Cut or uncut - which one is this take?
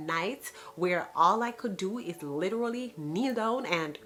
uncut